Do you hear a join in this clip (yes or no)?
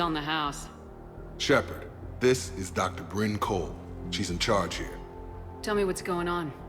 no